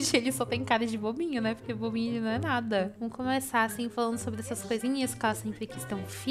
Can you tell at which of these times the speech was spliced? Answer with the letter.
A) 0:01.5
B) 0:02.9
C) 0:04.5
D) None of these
B